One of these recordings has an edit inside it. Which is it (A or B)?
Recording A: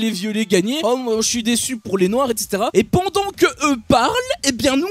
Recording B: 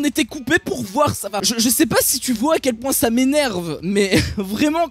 A